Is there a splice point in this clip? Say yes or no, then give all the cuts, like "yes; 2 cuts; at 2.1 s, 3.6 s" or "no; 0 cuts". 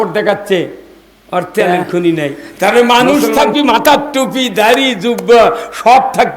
yes; 1 cut; at 2.4 s